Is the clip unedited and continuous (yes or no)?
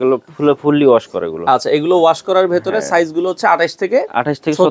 yes